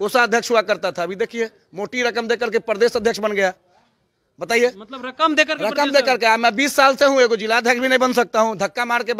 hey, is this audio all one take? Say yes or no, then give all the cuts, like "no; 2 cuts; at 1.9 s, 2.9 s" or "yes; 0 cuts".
yes; 0 cuts